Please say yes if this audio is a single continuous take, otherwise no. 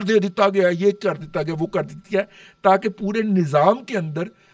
yes